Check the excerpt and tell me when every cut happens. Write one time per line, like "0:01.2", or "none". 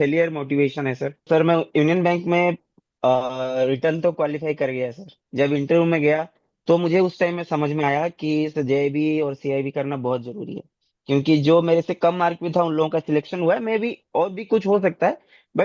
0:01.3